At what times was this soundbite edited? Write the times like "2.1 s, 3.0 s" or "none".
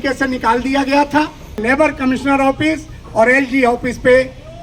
1.6 s

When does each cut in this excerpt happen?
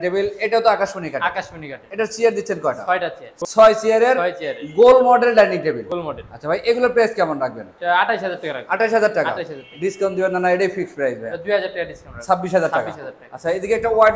none

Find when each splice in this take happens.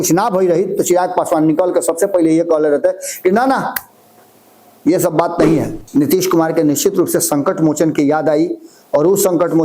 5.8 s

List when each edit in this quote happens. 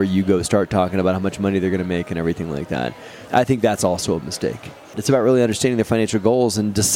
4.9 s

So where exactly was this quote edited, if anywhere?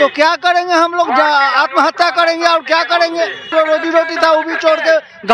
3.5 s

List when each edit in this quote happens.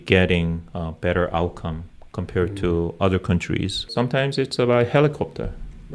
3.9 s

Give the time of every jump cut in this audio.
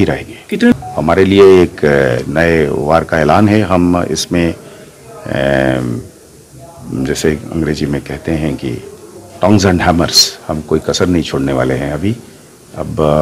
0.7 s, 2.3 s

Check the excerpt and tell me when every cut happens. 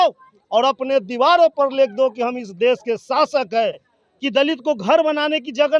3.9 s

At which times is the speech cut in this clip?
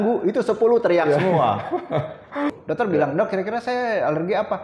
2.6 s

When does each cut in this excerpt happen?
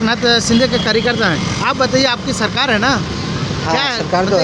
none

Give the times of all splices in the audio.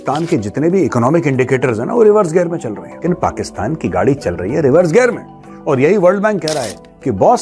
2.8 s

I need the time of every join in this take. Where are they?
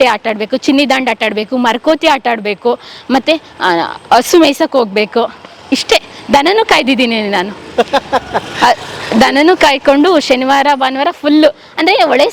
none

